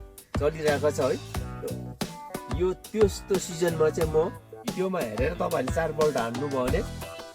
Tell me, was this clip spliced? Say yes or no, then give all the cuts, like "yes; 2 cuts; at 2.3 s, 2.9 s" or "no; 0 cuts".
yes; 1 cut; at 4.7 s